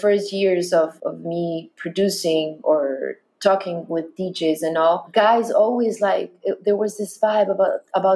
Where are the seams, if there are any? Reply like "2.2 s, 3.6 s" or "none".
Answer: 1.0 s, 5.0 s